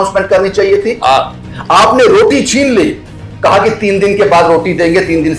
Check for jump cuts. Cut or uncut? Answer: uncut